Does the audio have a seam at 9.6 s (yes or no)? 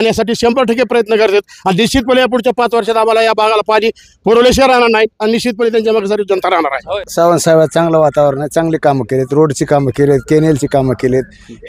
no